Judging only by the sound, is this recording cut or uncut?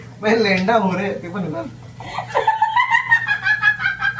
uncut